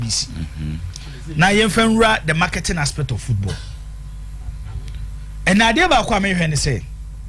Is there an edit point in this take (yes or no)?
no